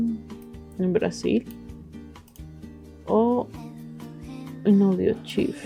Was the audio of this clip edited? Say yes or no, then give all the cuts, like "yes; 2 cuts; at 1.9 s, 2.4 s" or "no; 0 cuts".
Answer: no; 0 cuts